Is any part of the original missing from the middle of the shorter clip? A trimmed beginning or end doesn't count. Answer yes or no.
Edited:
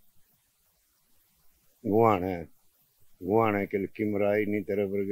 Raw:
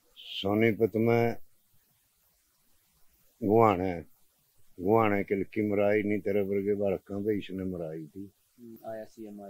no